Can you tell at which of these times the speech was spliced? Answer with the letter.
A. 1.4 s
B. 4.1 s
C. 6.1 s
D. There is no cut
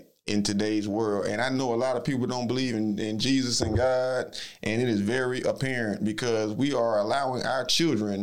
D